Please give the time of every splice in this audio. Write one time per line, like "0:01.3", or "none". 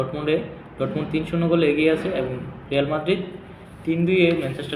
none